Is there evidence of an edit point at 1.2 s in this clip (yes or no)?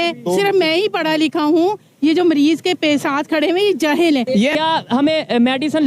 no